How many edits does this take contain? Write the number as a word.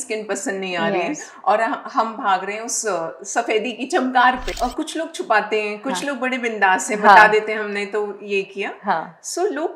one